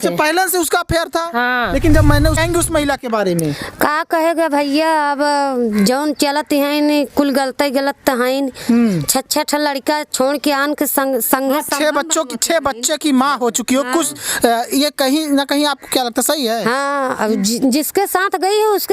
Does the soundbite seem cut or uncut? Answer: cut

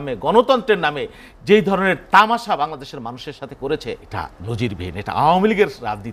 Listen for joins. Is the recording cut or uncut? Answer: cut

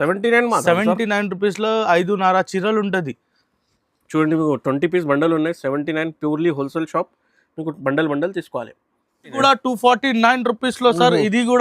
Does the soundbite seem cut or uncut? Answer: cut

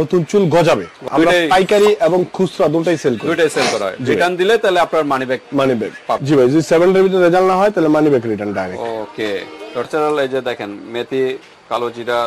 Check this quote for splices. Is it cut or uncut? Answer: cut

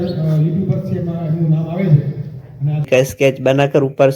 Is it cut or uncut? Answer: cut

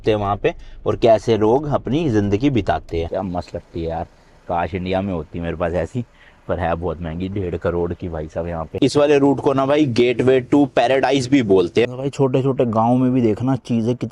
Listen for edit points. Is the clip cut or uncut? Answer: cut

